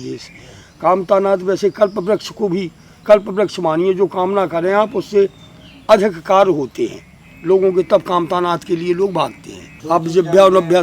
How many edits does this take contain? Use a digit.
1